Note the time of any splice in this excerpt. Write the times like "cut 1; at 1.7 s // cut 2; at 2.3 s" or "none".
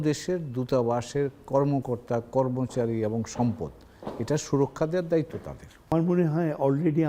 cut 1; at 5.9 s